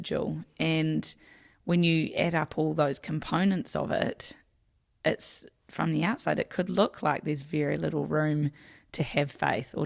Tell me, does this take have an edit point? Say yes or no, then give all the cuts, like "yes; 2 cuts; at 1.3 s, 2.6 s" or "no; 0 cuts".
no; 0 cuts